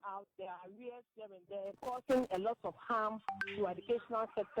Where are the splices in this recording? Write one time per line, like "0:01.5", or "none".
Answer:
0:02.0